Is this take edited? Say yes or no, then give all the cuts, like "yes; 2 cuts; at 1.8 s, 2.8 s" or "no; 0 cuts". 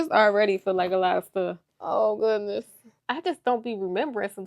yes; 1 cut; at 3.0 s